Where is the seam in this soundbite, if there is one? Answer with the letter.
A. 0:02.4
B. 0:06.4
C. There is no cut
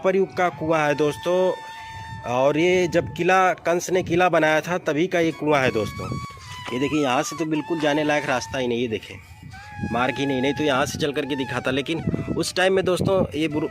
B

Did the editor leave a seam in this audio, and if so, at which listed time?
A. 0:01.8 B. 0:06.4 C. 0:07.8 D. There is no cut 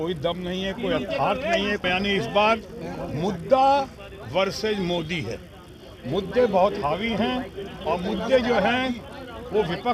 A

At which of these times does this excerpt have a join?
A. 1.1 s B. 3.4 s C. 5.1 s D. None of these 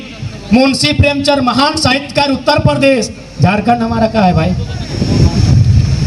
D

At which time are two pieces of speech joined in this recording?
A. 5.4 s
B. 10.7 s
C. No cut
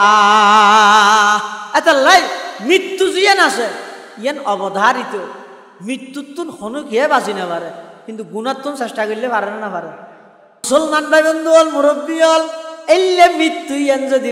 B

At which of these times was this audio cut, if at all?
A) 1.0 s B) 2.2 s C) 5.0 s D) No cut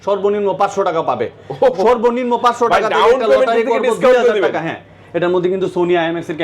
C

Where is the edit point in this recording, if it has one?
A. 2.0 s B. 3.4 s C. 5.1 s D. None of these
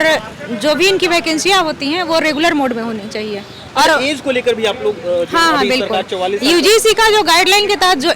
D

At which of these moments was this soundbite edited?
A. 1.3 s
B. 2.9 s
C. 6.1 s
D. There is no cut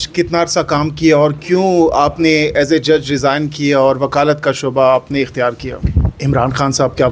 C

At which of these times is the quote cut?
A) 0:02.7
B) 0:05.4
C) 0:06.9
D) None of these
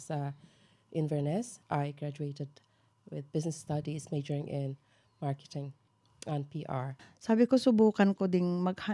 C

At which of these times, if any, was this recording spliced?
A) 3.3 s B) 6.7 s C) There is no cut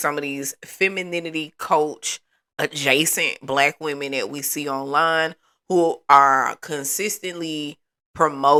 C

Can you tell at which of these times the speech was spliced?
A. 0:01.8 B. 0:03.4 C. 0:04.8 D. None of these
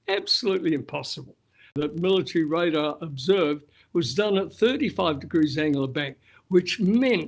A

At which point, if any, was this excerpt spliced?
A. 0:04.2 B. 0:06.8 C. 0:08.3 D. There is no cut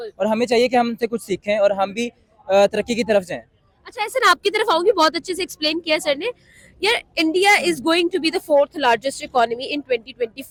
D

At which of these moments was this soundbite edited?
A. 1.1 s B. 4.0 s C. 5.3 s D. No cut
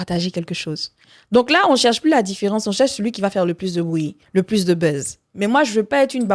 C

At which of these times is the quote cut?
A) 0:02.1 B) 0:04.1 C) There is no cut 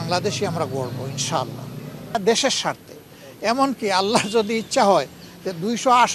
A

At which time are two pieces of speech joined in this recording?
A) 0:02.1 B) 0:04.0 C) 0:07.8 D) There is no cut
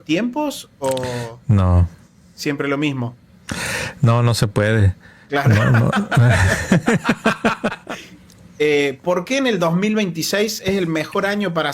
C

